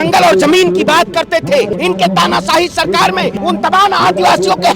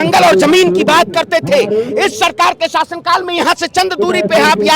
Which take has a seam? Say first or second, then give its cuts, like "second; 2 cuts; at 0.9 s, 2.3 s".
first; 2 cuts; at 1.7 s, 3.4 s